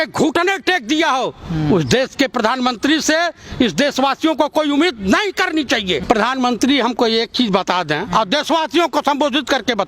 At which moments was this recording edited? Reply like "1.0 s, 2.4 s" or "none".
6.0 s

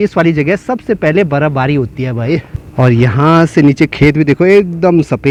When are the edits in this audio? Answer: none

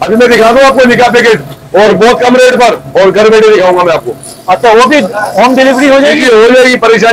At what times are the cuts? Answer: none

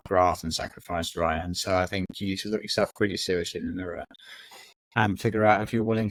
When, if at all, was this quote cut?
none

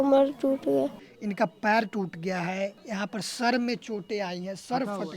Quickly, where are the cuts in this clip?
1.1 s, 2.8 s

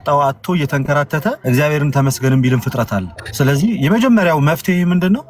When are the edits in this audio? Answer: 1.4 s, 3.2 s

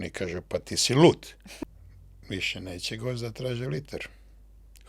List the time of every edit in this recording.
1.4 s

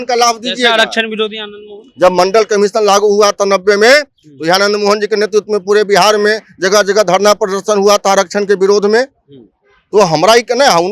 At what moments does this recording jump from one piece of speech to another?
none

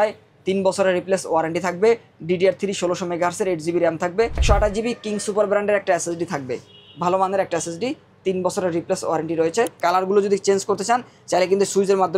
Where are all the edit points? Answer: 4.4 s, 9.8 s

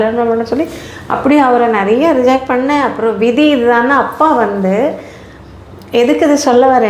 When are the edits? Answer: none

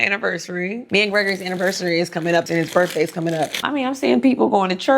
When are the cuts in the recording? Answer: 0.8 s, 3.6 s

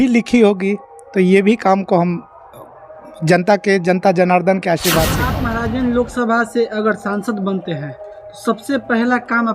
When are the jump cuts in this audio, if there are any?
5.3 s

